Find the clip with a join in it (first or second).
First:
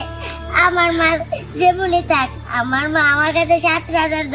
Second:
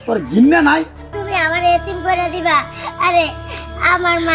second